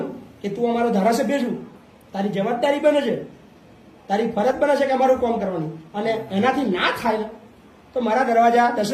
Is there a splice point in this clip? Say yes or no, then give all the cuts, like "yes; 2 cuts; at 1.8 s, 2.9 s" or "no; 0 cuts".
no; 0 cuts